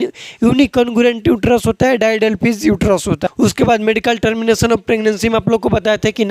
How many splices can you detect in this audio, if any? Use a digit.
1